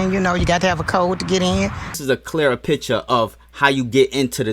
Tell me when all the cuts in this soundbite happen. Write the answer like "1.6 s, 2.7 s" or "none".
2.0 s